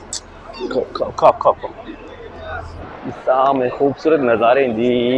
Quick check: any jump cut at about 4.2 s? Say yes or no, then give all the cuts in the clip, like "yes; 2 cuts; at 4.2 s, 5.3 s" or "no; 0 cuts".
no; 1 cut; at 2.8 s